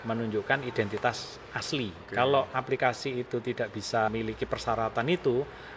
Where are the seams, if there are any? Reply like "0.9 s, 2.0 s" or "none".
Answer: 2.0 s, 4.1 s